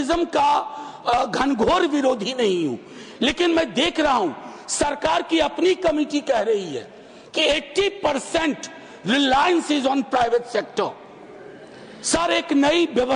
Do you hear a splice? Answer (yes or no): no